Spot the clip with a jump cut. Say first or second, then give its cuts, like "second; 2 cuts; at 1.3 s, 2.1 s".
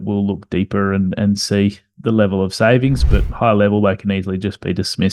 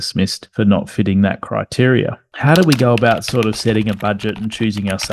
second; 1 cut; at 2.3 s